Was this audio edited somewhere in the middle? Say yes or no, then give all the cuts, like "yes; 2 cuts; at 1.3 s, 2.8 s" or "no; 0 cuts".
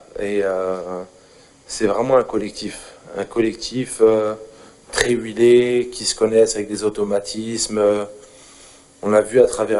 no; 0 cuts